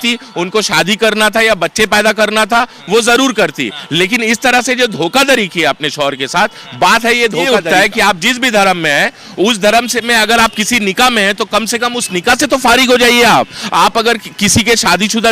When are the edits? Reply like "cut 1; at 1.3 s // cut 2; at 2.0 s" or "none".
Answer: cut 1; at 7.5 s